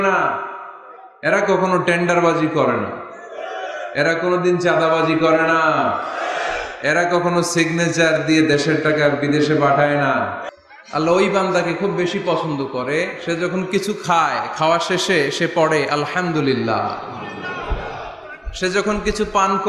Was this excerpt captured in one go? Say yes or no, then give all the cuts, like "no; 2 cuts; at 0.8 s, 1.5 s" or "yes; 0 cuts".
no; 1 cut; at 10.4 s